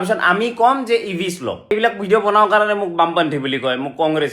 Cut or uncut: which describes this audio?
cut